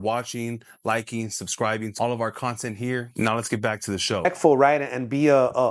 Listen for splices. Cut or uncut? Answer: uncut